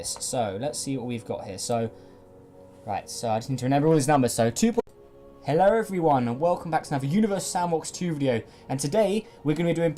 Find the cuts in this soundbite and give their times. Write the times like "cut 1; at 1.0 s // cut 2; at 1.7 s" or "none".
none

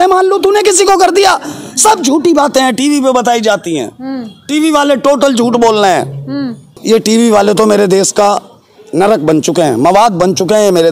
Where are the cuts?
none

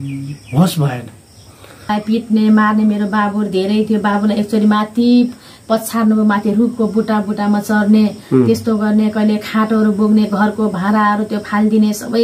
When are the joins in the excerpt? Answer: cut 1; at 1.9 s

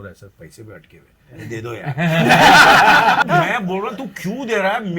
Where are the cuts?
cut 1; at 3.2 s

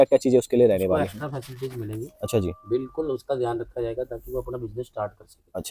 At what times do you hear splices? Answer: none

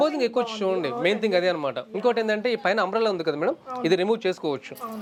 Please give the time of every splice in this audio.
none

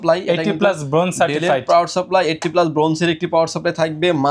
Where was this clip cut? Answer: none

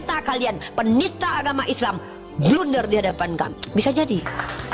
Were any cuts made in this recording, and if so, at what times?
none

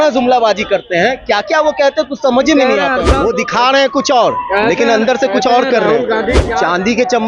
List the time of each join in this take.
cut 1; at 3.1 s // cut 2; at 6.4 s

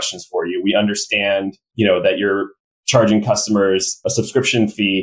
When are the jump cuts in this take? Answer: cut 1; at 1.6 s // cut 2; at 4.0 s

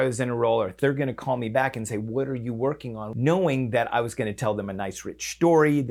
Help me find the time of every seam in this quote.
cut 1; at 0.7 s // cut 2; at 3.0 s

